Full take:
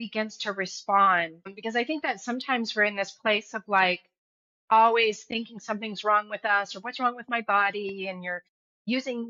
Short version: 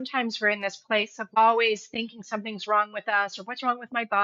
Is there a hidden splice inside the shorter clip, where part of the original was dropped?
yes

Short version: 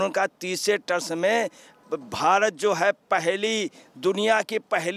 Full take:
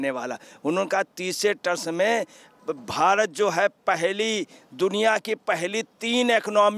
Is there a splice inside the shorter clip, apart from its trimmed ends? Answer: no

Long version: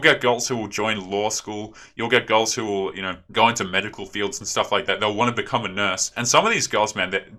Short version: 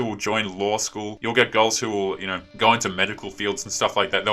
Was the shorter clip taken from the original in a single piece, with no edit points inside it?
no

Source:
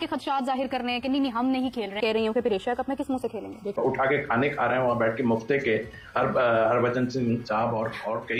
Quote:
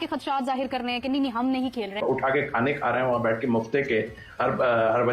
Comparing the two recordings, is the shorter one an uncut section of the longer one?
no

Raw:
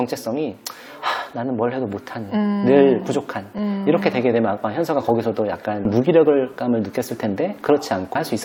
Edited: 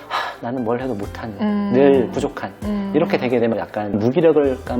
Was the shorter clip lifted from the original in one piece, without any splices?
no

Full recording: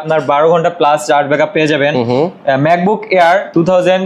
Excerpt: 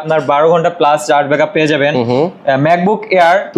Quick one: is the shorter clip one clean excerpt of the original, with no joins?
yes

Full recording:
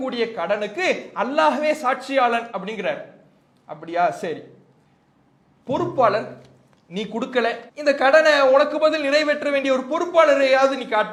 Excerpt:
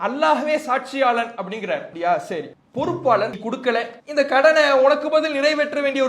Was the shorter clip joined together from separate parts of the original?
yes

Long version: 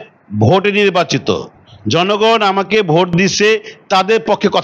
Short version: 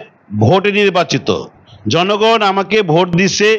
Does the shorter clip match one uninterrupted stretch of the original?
yes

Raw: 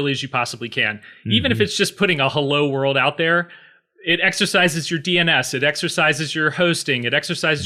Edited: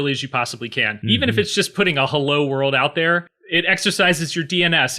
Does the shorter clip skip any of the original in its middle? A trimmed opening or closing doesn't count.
yes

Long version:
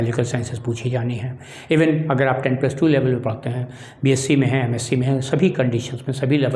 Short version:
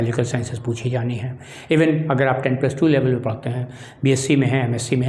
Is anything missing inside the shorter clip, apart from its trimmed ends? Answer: no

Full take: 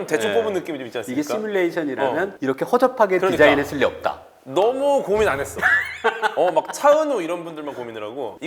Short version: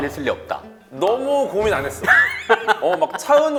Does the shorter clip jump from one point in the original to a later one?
no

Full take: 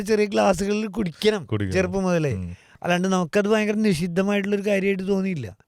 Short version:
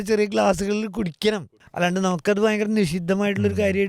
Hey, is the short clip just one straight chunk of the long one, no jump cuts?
no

